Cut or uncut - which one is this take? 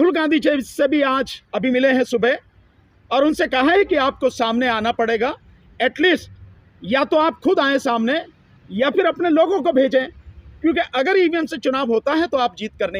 uncut